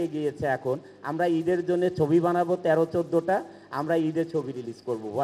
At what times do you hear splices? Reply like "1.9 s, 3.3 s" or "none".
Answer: none